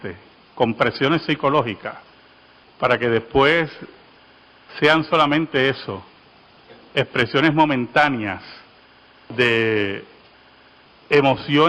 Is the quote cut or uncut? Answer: uncut